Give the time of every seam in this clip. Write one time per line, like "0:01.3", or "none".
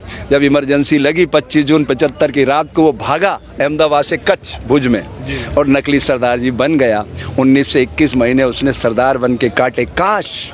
none